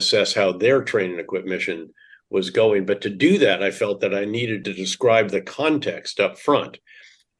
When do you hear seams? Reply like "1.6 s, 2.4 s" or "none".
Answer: 4.6 s